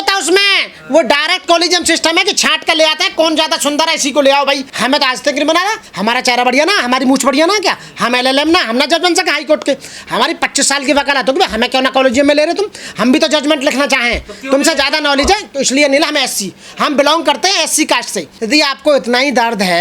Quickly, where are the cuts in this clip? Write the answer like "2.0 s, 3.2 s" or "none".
4.7 s, 5.9 s, 18.3 s